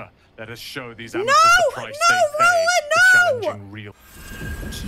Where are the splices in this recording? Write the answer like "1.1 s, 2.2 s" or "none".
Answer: 3.9 s